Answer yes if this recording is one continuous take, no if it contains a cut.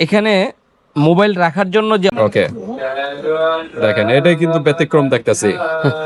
no